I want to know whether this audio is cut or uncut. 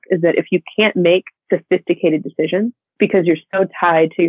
cut